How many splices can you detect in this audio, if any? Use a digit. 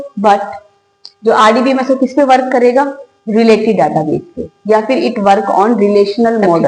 0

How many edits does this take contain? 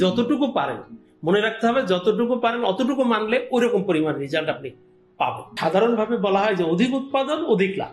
1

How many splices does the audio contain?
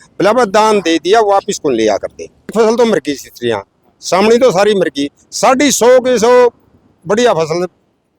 1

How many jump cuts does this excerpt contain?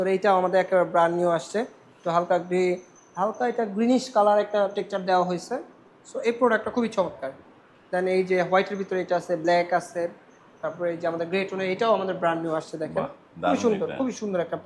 0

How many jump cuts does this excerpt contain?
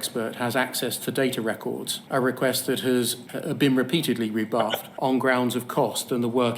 2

